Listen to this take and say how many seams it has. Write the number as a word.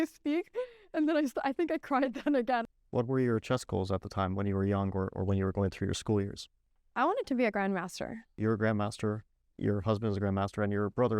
two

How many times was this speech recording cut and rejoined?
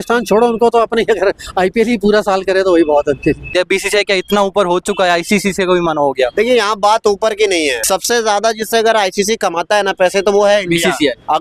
two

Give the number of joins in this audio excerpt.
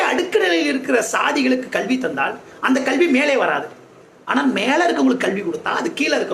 zero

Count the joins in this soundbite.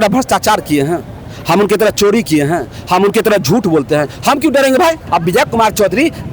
one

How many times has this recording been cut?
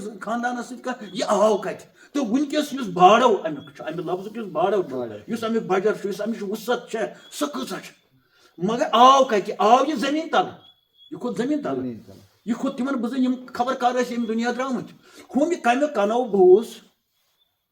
zero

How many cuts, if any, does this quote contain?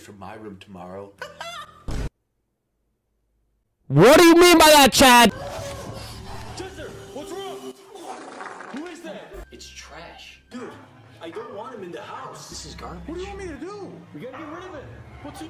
one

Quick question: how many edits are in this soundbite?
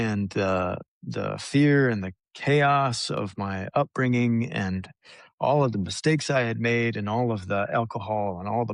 zero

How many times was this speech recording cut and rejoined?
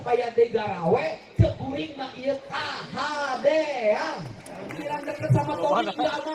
one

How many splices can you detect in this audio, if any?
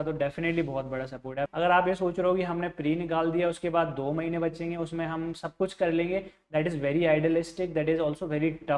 one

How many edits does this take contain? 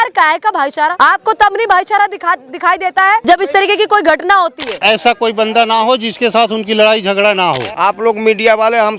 four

